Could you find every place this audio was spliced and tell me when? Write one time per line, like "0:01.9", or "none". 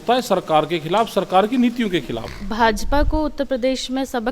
0:02.3